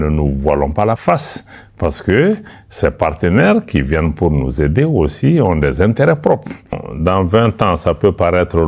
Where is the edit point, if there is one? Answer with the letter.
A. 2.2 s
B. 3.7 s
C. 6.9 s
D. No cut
C